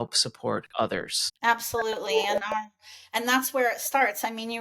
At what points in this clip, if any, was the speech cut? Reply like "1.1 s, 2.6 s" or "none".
1.2 s